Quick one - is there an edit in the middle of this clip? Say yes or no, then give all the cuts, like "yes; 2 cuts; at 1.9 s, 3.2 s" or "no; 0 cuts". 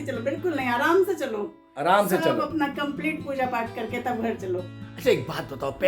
yes; 1 cut; at 4.7 s